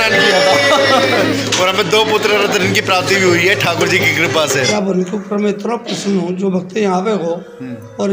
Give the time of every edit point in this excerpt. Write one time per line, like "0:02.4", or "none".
0:04.7

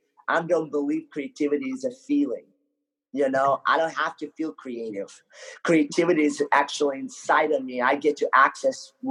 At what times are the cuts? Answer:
none

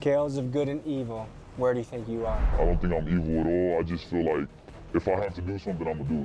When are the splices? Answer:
none

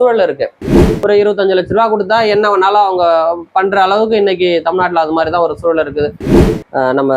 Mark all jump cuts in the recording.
0:01.0
0:06.2

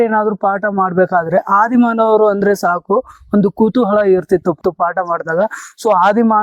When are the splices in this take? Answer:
0:04.6

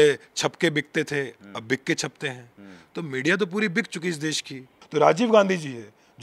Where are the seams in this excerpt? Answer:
0:04.8

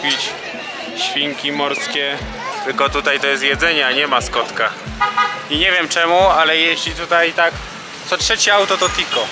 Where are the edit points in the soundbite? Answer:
0:02.5
0:04.8

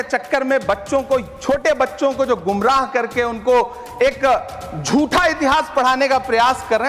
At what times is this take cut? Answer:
none

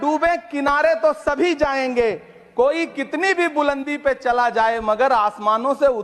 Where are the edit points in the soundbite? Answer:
none

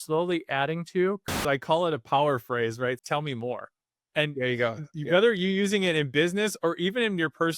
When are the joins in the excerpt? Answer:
0:01.4
0:03.0

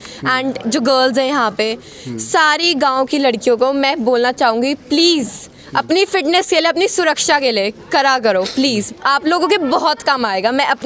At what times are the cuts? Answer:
none

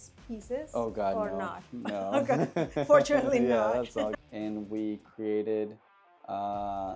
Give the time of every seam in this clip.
0:04.1

